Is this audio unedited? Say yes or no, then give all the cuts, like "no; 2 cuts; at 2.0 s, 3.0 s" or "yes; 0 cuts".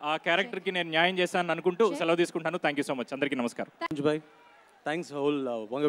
no; 1 cut; at 3.9 s